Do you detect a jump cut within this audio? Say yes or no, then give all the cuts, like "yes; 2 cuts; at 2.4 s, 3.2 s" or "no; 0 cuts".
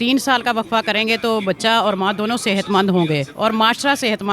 no; 0 cuts